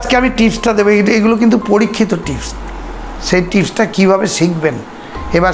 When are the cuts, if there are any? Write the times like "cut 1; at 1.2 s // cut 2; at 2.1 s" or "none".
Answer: none